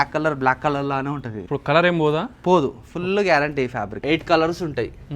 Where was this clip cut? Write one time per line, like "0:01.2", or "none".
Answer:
0:01.3
0:03.9